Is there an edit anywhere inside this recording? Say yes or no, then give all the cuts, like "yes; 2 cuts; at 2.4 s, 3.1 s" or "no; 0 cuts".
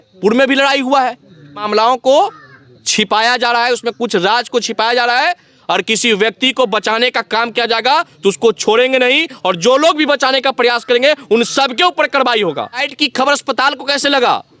yes; 2 cuts; at 1.6 s, 12.9 s